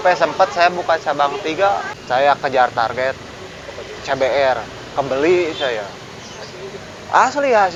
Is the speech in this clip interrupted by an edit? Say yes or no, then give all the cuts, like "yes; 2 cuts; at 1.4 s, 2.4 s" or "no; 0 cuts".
no; 0 cuts